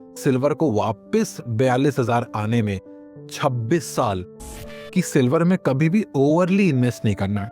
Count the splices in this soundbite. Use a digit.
1